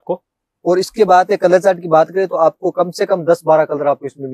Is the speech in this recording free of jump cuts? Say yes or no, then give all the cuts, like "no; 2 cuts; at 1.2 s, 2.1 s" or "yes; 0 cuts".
yes; 0 cuts